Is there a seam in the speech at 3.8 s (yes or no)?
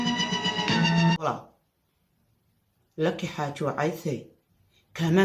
no